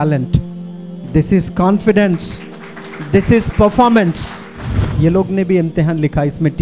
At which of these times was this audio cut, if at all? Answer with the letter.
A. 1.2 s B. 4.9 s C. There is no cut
B